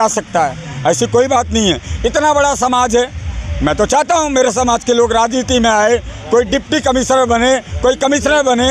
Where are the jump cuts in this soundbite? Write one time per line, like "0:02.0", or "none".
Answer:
none